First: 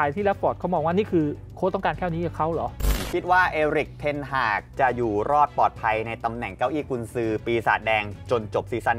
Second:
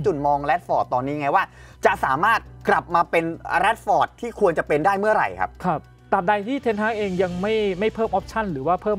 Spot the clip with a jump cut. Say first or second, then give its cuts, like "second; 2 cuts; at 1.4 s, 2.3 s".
first; 1 cut; at 3.0 s